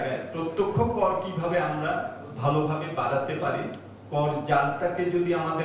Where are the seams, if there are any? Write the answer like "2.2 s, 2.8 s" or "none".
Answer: none